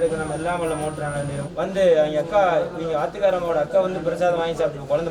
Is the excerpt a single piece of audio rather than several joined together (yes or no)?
no